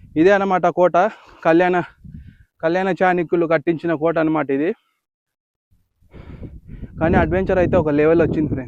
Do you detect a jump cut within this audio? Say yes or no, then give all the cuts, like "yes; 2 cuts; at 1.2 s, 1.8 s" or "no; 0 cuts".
no; 0 cuts